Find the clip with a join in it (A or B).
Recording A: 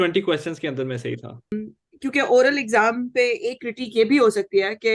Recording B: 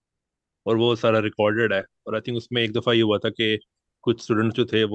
A